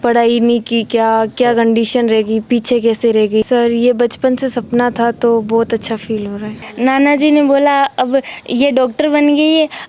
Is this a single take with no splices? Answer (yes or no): no